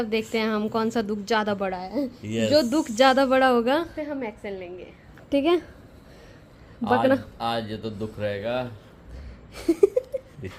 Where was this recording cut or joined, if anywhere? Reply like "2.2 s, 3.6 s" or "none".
none